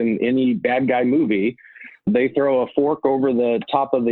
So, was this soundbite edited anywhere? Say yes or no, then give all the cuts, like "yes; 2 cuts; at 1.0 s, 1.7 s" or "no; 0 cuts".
yes; 1 cut; at 2.1 s